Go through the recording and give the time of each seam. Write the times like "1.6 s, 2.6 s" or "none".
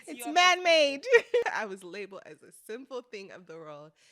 1.4 s